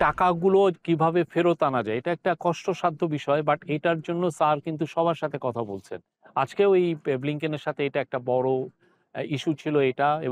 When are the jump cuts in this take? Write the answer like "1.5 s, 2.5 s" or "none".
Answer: none